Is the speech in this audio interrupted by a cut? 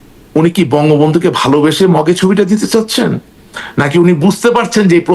no; 0 cuts

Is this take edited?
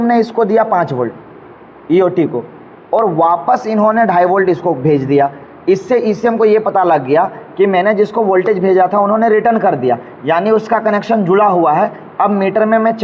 no; 0 cuts

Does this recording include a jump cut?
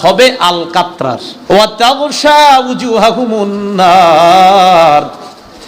yes; 1 cut; at 1.3 s

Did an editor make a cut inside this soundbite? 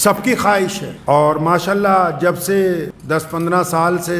yes; 2 cuts; at 0.9 s, 2.9 s

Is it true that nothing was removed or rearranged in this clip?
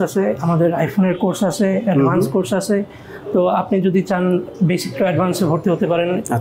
yes; 0 cuts

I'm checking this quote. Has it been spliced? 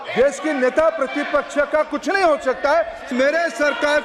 yes; 1 cut; at 3.1 s

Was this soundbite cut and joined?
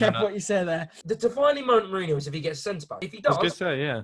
yes; 2 cuts; at 0.9 s, 2.9 s

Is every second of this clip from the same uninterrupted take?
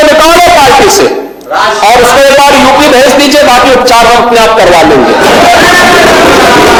yes; 0 cuts

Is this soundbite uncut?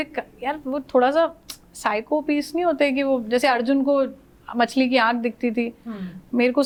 yes; 0 cuts

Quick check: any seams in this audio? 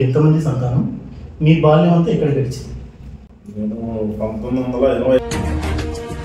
yes; 1 cut; at 5.2 s

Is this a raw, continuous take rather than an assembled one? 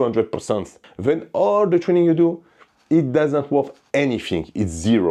yes; 0 cuts

